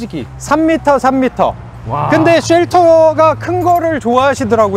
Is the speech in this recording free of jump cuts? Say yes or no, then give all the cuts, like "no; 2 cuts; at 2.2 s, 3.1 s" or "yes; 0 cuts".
yes; 0 cuts